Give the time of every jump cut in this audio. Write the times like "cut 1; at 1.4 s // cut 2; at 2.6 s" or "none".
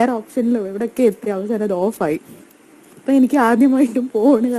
cut 1; at 3.2 s